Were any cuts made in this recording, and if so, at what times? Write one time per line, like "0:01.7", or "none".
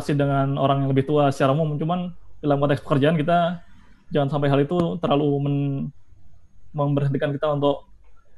none